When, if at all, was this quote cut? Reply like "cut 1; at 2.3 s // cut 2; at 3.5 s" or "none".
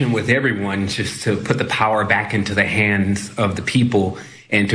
cut 1; at 3.3 s